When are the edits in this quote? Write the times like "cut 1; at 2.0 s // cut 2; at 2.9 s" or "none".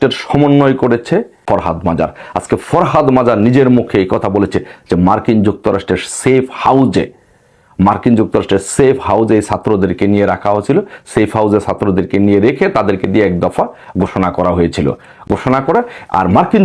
cut 1; at 1.4 s